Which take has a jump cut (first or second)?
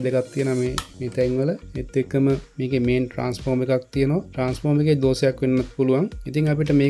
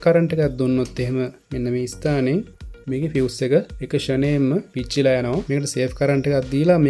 second